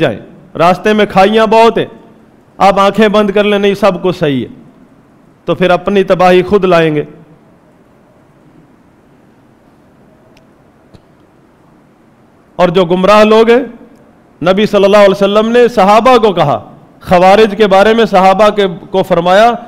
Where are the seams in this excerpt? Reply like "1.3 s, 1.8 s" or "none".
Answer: none